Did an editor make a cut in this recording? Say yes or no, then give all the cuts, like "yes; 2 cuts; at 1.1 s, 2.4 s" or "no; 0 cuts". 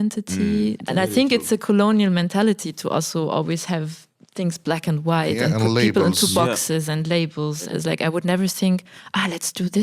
yes; 2 cuts; at 0.8 s, 7.7 s